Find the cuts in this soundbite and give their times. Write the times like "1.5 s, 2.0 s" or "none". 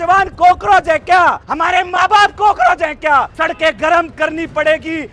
1.5 s, 3.3 s